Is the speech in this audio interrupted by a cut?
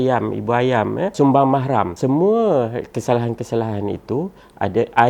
yes; 2 cuts; at 1.1 s, 1.9 s

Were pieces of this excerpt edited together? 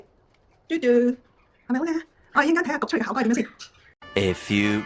no; 0 cuts

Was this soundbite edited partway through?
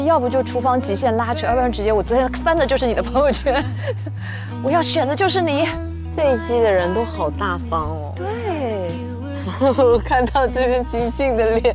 no; 0 cuts

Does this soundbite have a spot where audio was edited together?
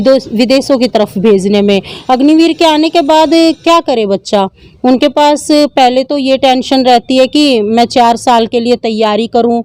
yes; 1 cut; at 1.9 s

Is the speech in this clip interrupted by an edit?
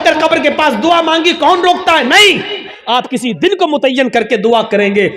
yes; 1 cut; at 2.7 s

